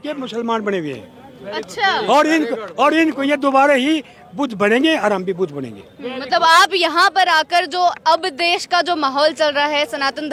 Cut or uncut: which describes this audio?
uncut